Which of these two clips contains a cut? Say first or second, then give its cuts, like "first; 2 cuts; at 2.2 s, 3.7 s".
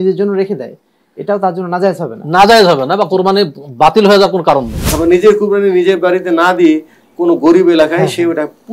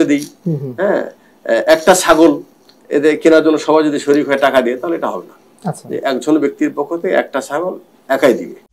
first; 1 cut; at 4.8 s